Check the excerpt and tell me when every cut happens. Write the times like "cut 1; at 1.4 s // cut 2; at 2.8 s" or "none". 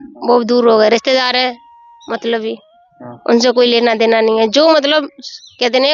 none